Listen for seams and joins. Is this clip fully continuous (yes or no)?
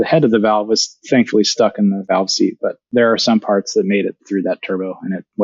no